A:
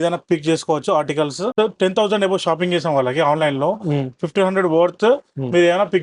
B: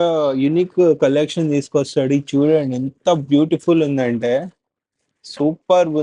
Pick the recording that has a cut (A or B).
A